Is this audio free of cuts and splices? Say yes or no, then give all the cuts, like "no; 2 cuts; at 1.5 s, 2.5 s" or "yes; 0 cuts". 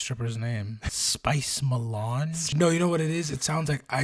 no; 2 cuts; at 1.1 s, 2.5 s